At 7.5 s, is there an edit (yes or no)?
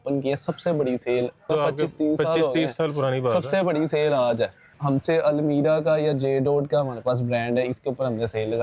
no